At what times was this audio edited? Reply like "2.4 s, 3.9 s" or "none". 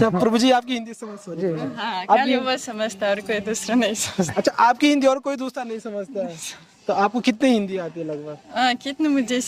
none